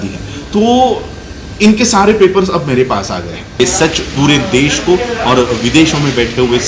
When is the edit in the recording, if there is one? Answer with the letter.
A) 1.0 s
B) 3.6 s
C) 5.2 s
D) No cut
B